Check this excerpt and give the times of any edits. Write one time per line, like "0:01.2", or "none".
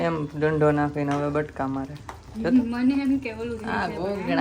none